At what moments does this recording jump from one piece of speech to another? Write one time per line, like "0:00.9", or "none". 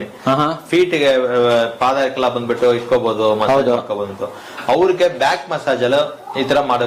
none